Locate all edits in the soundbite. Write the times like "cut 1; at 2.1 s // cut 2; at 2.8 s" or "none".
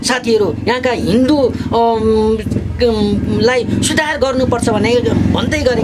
none